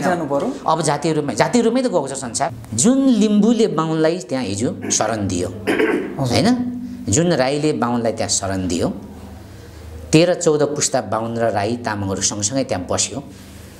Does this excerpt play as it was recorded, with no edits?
no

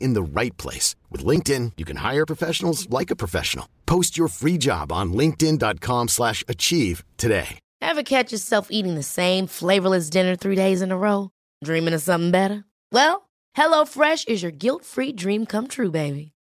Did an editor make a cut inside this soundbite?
yes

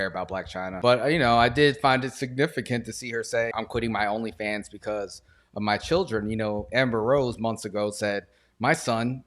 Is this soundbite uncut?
no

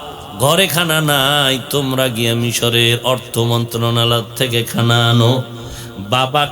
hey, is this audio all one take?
yes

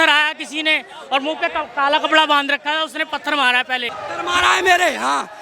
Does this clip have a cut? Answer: yes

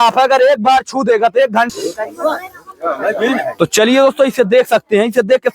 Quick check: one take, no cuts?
no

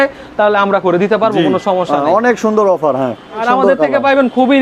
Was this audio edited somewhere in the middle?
yes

